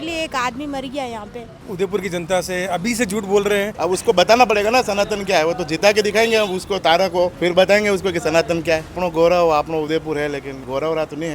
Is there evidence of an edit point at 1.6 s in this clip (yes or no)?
yes